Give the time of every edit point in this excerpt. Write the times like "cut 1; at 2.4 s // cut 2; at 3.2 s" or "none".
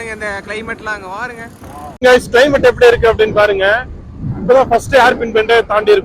cut 1; at 2.0 s

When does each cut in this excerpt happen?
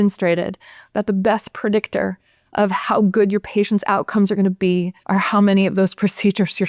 cut 1; at 5.0 s

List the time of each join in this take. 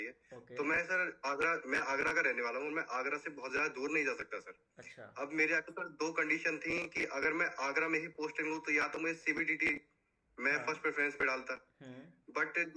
none

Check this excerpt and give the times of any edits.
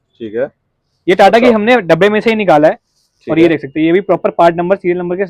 none

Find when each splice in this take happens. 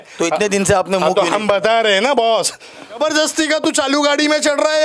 cut 1; at 3.0 s

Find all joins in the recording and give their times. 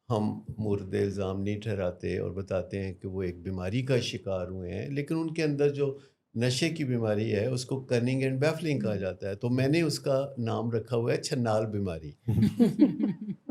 none

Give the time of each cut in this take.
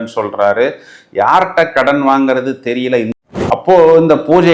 cut 1; at 3.1 s

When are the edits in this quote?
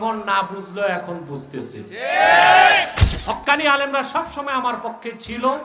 cut 1; at 3.1 s

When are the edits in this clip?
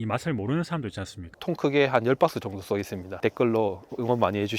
cut 1; at 1.4 s

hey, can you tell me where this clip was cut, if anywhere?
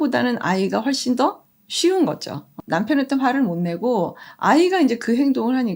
cut 1; at 2.6 s // cut 2; at 4.2 s

